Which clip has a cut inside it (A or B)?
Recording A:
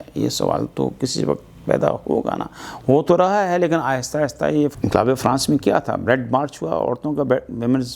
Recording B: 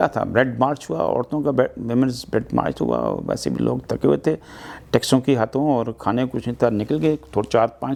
A